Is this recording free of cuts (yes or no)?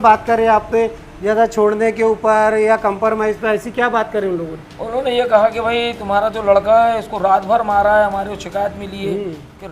yes